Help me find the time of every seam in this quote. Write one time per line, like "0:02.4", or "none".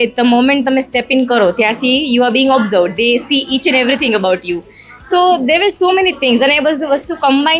none

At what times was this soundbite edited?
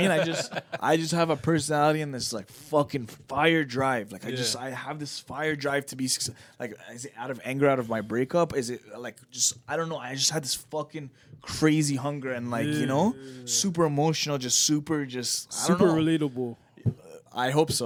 none

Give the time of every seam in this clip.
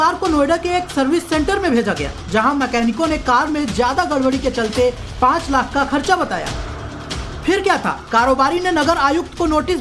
0:02.8

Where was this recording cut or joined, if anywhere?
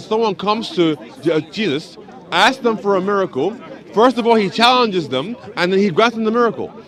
none

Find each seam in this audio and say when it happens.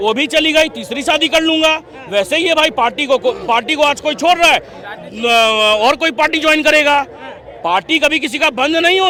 none

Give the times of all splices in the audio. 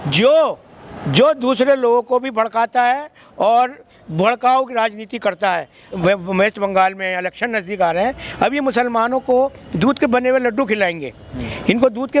0:06.0

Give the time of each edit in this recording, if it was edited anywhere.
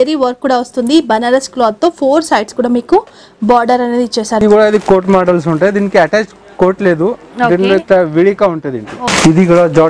0:04.4
0:09.0

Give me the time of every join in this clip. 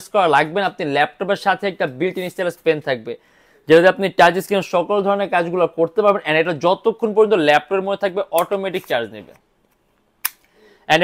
none

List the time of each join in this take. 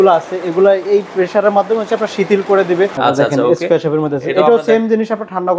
0:02.9

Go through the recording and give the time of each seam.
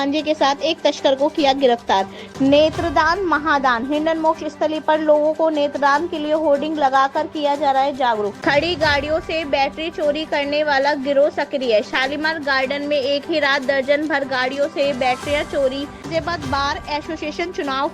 0:02.2
0:08.4
0:16.0

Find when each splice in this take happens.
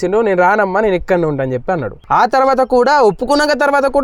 0:01.9

